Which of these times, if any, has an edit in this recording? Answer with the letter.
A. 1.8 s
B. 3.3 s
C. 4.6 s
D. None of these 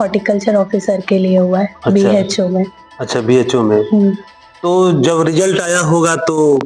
D